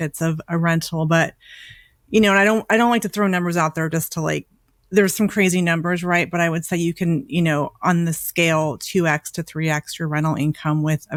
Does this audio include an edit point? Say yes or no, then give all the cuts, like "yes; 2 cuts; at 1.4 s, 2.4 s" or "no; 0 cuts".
no; 0 cuts